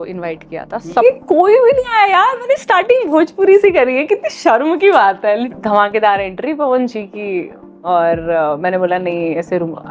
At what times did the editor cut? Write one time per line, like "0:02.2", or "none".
0:01.0
0:05.5